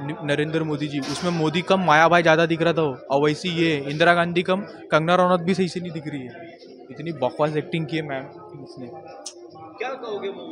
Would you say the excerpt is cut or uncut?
uncut